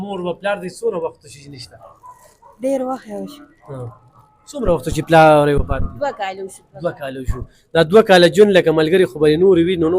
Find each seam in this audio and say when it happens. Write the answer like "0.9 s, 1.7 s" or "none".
none